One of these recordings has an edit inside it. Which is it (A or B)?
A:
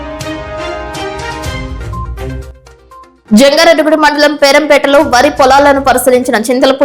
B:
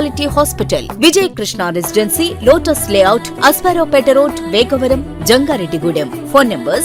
A